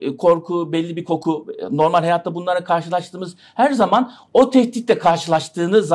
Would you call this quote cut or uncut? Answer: uncut